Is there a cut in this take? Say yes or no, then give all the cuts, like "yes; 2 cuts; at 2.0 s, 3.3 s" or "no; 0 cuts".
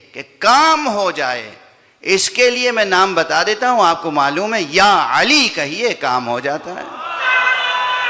no; 0 cuts